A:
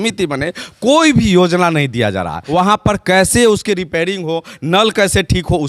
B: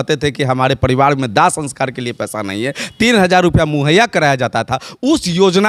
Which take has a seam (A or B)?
A